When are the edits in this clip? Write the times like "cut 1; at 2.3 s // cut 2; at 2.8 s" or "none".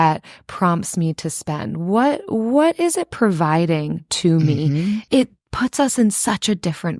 cut 1; at 5.0 s